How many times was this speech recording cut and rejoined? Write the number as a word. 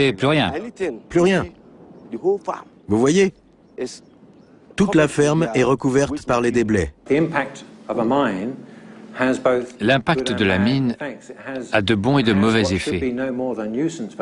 one